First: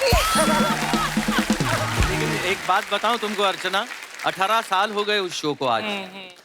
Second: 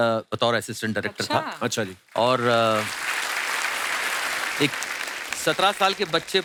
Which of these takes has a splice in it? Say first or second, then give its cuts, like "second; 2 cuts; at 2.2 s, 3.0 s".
first; 1 cut; at 2.4 s